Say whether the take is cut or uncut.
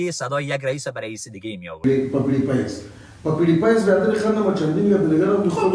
cut